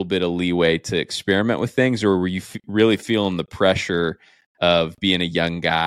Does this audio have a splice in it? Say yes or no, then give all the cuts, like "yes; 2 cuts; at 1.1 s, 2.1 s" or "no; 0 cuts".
no; 0 cuts